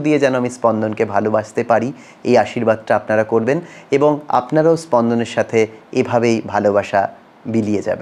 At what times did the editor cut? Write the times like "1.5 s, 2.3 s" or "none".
none